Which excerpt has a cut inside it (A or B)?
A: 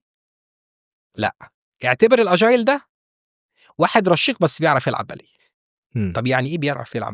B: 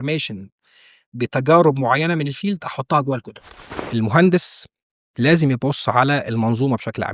B